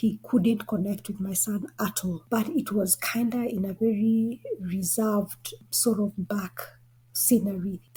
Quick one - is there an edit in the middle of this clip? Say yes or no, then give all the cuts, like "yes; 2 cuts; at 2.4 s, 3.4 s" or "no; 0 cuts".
no; 0 cuts